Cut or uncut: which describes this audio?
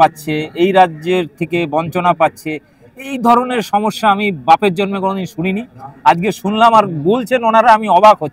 uncut